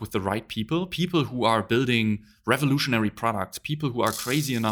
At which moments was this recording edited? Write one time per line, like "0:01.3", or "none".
none